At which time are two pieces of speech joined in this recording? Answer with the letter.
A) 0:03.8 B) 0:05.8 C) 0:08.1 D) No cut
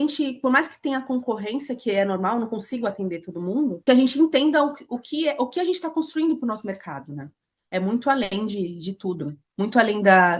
A